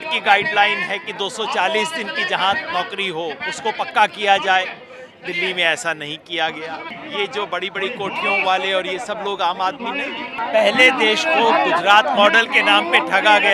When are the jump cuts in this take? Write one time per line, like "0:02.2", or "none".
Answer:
0:06.9
0:10.4